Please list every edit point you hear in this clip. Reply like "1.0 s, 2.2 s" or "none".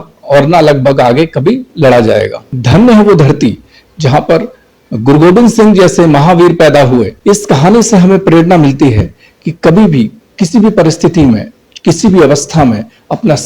2.5 s